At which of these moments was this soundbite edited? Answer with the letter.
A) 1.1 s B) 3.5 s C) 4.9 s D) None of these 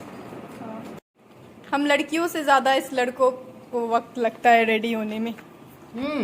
A